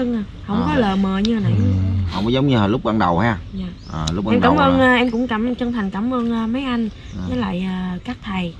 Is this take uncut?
yes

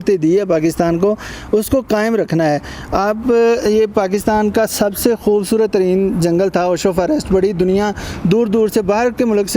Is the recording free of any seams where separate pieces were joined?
yes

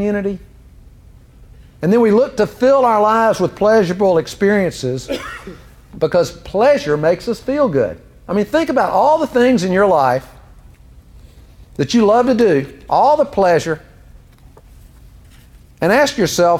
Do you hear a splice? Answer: yes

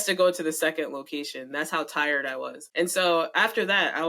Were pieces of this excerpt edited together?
yes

